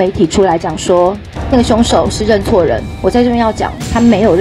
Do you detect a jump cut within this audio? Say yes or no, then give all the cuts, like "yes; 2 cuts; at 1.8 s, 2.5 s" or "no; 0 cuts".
yes; 1 cut; at 1.3 s